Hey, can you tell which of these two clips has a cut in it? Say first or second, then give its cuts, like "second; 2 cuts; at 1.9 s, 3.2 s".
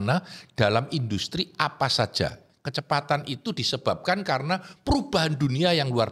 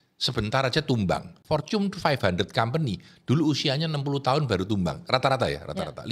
first; 1 cut; at 2.5 s